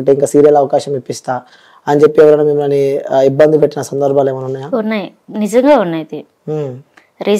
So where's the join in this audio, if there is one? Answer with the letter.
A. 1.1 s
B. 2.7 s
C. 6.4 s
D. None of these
D